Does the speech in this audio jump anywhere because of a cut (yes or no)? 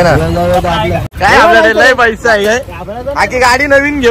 yes